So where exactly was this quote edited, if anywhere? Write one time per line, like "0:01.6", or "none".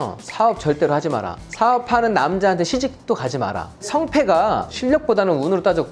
0:03.8